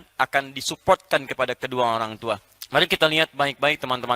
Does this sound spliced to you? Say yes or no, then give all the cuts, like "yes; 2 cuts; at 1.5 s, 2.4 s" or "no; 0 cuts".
yes; 1 cut; at 2.5 s